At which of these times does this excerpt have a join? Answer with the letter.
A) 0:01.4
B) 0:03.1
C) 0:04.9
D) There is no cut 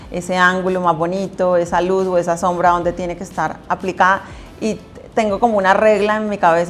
D